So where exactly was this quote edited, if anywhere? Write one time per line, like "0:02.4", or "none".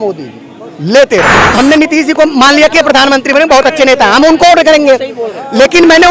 0:01.4